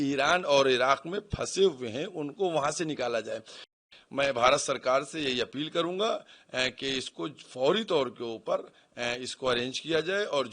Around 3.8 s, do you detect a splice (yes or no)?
yes